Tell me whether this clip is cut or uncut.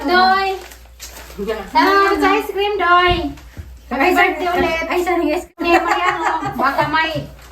cut